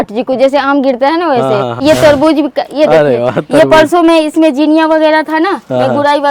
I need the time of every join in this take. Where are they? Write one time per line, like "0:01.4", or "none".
0:01.8